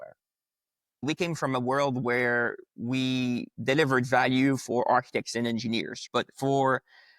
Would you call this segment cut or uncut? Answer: cut